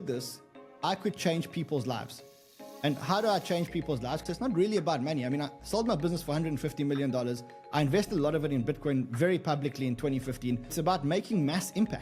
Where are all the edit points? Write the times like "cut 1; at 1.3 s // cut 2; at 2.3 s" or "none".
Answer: cut 1; at 4.2 s // cut 2; at 10.7 s